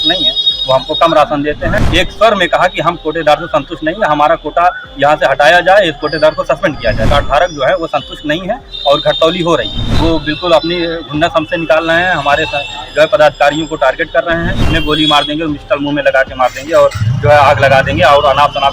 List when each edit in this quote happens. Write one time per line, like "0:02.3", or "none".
0:01.7
0:07.1
0:09.8
0:14.7